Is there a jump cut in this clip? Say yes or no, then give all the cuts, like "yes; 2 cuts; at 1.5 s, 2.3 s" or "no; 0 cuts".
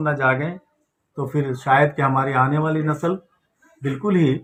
no; 0 cuts